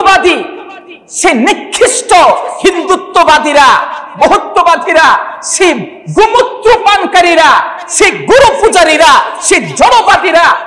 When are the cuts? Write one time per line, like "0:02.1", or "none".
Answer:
none